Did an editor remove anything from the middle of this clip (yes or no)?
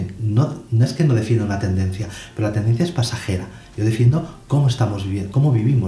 no